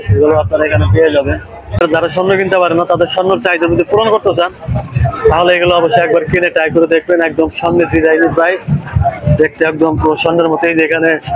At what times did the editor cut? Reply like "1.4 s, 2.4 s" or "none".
1.8 s